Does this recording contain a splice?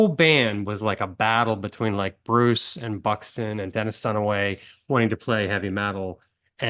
no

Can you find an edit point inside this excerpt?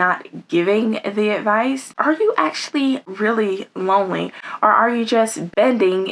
yes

